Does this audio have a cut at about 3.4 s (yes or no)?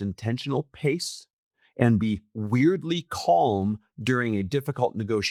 no